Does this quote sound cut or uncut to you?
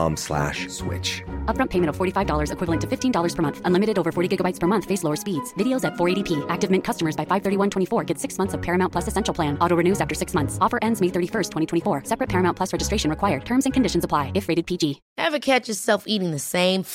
cut